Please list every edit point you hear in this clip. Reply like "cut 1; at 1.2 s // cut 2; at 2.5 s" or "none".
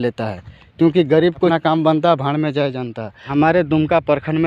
cut 1; at 1.5 s // cut 2; at 3.3 s